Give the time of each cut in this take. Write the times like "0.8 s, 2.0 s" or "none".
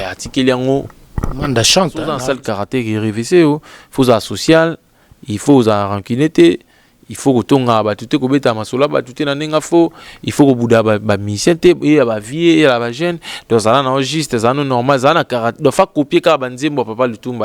2.1 s